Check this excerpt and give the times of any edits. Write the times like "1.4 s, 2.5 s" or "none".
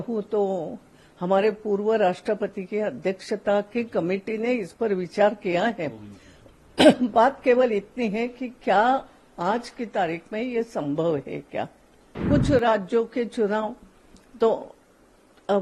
12.2 s